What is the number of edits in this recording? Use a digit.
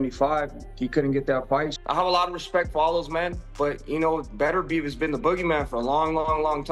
1